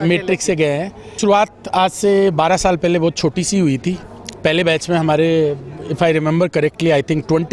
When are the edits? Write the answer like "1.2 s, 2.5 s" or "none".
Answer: 1.2 s